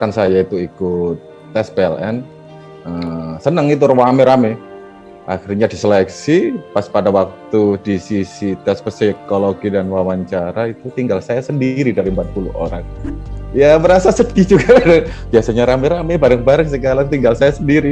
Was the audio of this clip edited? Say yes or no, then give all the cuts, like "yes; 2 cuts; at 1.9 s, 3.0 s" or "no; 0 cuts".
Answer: no; 0 cuts